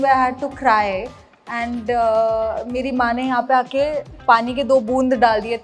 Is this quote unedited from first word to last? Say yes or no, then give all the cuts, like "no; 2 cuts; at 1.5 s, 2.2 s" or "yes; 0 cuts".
yes; 0 cuts